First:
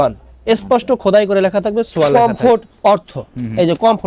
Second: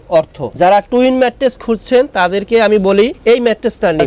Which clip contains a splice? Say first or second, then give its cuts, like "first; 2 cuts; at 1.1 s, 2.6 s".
first; 1 cut; at 2.1 s